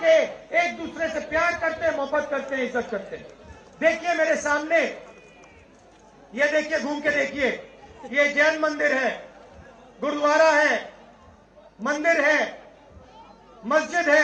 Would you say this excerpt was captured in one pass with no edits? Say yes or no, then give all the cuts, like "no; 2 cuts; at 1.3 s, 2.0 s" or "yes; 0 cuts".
yes; 0 cuts